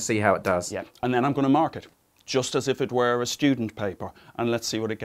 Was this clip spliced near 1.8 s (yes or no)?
no